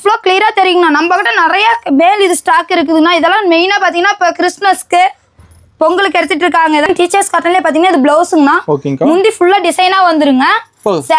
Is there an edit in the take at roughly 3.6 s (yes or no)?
no